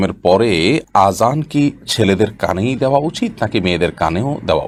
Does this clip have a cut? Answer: no; 0 cuts

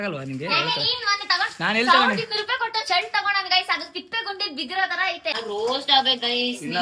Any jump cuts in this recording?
yes; 1 cut; at 5.3 s

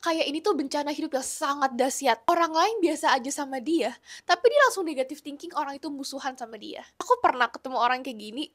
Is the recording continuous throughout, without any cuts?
no; 1 cut; at 6.9 s

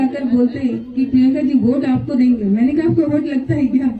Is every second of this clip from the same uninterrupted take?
yes; 0 cuts

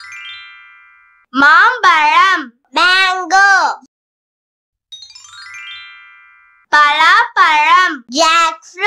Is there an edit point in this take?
no; 0 cuts

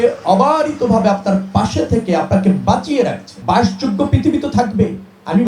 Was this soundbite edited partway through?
yes; 1 cut; at 3.3 s

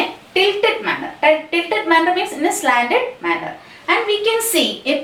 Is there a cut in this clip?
no; 0 cuts

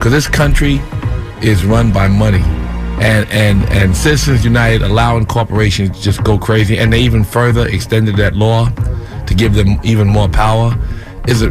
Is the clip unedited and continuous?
no; 1 cut; at 7.1 s

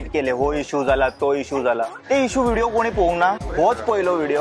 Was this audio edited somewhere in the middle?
yes; 2 cuts; at 2.0 s, 3.4 s

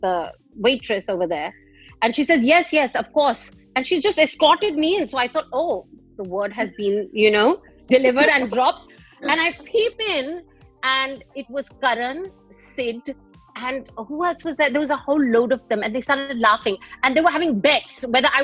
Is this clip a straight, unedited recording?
yes; 0 cuts

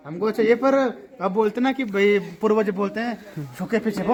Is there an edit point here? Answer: no; 0 cuts

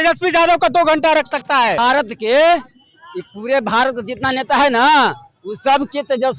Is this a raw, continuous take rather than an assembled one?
no; 1 cut; at 1.8 s

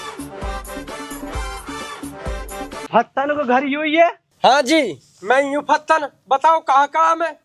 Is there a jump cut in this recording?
no; 0 cuts

